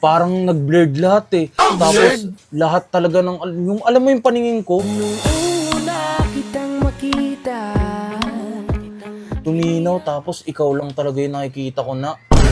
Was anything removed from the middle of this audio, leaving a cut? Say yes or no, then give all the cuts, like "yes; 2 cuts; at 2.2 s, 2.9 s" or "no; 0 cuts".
no; 0 cuts